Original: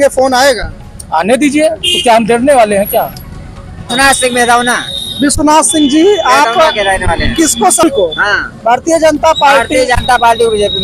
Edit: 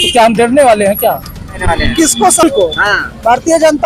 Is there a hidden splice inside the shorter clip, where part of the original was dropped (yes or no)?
yes